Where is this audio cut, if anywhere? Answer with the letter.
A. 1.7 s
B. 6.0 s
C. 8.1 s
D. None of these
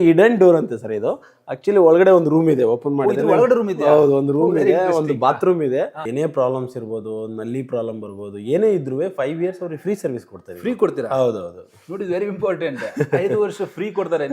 B